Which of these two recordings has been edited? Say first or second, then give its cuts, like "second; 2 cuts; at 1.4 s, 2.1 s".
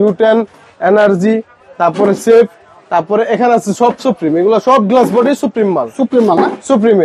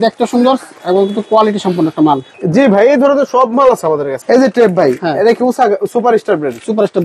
second; 2 cuts; at 2.3 s, 4.2 s